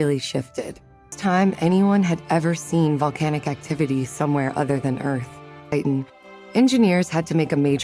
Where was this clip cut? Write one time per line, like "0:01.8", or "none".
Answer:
0:01.2
0:05.6